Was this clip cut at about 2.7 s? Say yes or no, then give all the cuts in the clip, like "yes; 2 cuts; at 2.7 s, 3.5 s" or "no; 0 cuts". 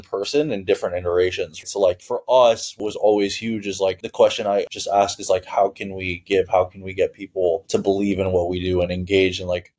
yes; 2 cuts; at 1.6 s, 2.7 s